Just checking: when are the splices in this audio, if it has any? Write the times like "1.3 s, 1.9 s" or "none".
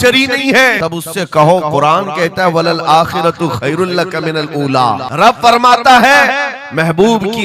0.8 s, 5.1 s